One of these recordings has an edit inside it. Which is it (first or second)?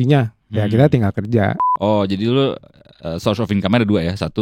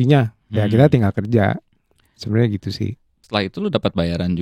first